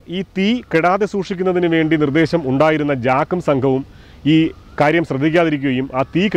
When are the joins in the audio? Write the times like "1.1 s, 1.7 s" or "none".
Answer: none